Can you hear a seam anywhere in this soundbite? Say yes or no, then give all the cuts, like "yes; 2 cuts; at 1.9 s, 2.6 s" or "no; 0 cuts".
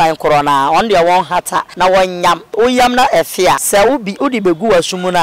yes; 3 cuts; at 1.7 s, 2.5 s, 3.6 s